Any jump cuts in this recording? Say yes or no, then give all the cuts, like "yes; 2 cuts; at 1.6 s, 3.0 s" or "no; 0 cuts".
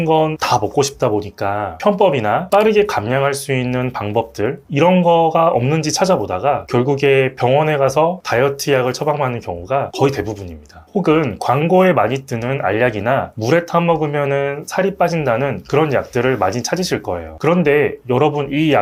no; 0 cuts